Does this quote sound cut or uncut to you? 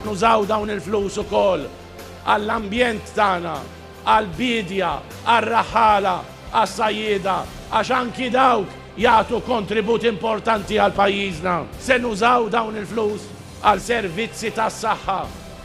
uncut